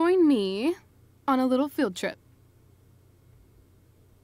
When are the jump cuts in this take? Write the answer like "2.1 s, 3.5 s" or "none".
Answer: 2.2 s